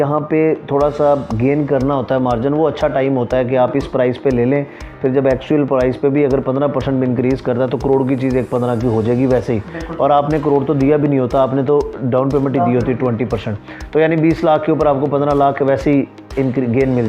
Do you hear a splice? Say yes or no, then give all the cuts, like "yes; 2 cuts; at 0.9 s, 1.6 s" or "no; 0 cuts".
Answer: no; 0 cuts